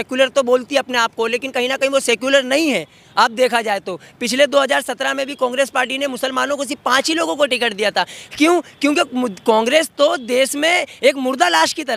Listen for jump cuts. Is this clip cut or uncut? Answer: uncut